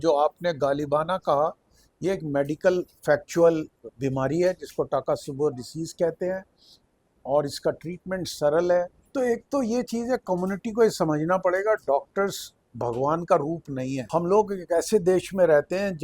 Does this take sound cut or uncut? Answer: cut